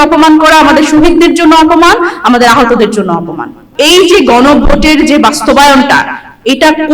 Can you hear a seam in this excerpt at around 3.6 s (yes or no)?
yes